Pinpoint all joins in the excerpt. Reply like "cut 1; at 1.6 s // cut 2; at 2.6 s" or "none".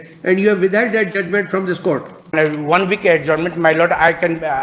cut 1; at 2.3 s